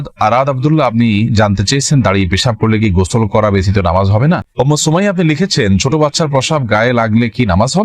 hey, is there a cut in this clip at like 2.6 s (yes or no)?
no